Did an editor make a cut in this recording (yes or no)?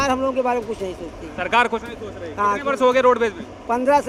no